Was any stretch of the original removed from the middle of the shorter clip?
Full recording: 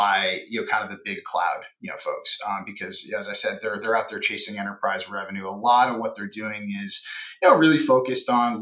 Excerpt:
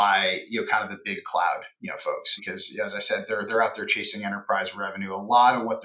yes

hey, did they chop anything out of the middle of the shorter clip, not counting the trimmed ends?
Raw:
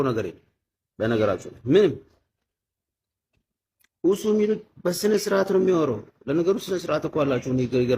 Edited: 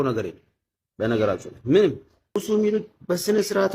yes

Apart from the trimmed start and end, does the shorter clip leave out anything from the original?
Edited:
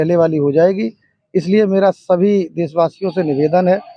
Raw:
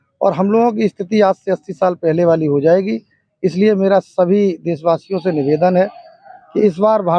no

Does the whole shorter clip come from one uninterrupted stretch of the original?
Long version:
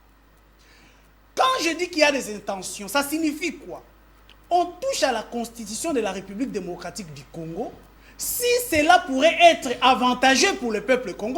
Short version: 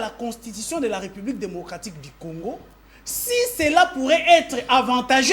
yes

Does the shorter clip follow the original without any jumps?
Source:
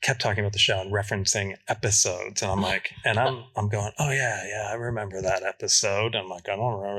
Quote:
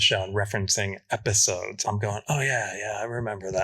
no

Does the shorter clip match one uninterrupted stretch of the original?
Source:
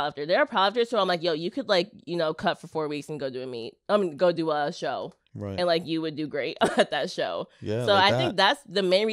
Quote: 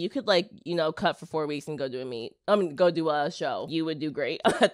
no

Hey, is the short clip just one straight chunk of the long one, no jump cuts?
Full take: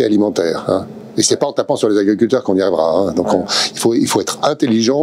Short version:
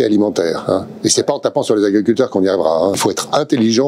no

